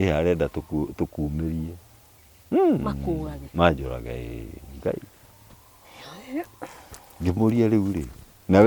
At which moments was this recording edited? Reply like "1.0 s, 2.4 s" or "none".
none